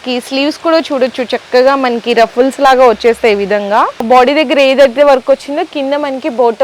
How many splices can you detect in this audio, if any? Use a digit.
1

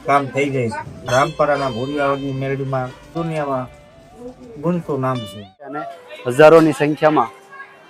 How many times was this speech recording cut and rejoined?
3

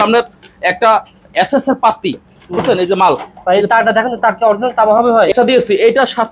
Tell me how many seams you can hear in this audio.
1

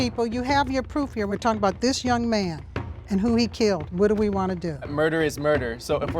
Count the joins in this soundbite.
1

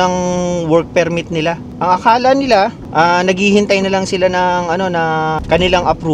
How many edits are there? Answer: 1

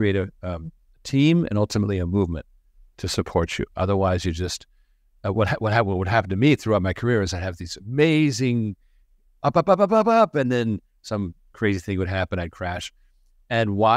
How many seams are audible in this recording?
0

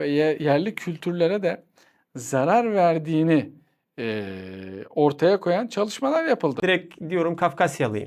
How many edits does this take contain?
1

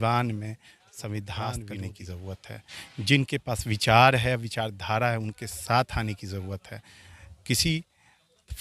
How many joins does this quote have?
1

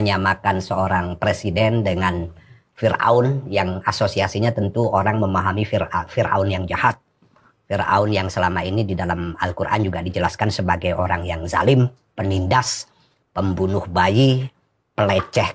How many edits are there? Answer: 0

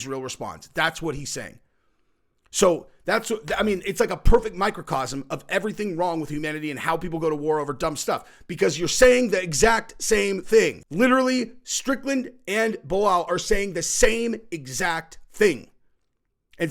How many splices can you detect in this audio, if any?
1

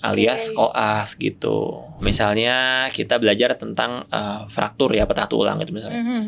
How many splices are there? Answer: 1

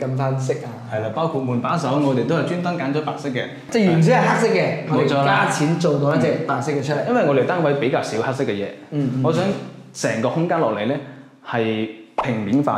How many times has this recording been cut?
0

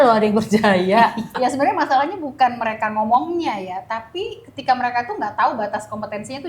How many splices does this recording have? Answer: 1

